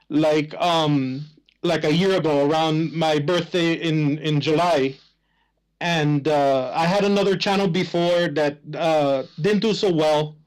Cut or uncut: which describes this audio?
uncut